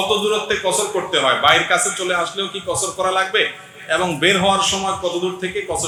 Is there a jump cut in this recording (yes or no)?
no